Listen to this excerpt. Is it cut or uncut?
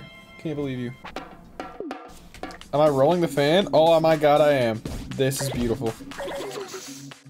cut